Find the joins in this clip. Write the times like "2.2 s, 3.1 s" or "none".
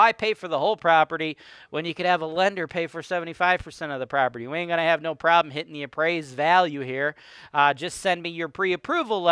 none